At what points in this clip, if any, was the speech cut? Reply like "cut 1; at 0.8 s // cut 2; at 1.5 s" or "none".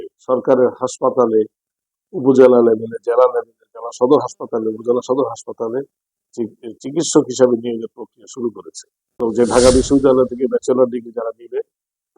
cut 1; at 9.1 s